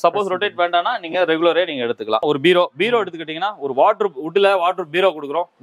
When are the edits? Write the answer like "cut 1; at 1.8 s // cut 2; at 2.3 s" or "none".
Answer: cut 1; at 2.2 s